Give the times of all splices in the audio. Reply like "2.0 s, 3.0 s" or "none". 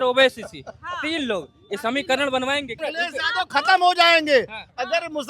2.9 s